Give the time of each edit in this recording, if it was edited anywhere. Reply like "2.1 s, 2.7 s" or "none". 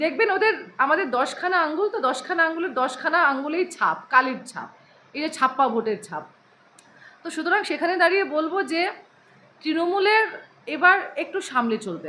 none